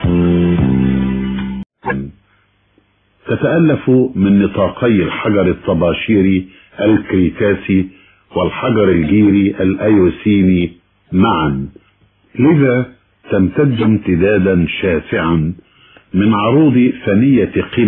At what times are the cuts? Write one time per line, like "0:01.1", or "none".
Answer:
0:01.7